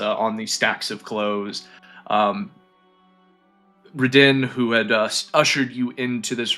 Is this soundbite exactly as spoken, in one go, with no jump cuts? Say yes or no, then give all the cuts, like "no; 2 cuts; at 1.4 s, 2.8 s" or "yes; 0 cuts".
yes; 0 cuts